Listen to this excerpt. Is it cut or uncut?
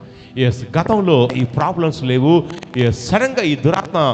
cut